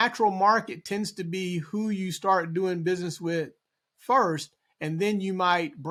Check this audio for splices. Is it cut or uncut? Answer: uncut